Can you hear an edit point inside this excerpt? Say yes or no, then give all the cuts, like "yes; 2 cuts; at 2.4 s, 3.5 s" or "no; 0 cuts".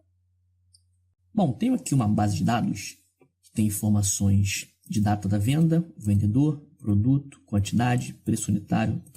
yes; 1 cut; at 1.0 s